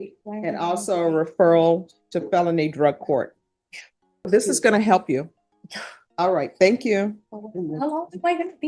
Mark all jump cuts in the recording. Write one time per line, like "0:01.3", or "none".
0:04.3